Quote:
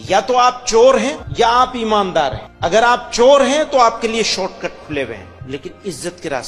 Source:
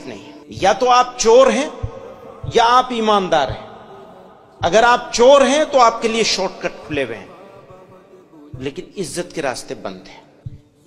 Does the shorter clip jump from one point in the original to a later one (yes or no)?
yes